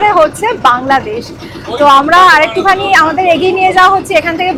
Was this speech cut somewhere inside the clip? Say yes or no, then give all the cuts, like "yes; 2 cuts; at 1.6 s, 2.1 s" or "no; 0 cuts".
no; 0 cuts